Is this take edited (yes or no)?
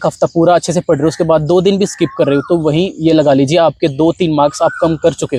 no